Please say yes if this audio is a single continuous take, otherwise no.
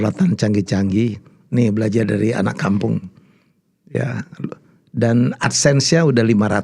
yes